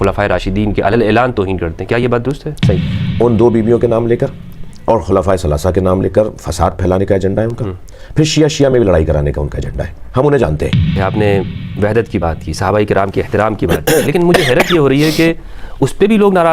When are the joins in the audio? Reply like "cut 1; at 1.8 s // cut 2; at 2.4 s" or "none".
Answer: cut 1; at 2.5 s // cut 2; at 11.0 s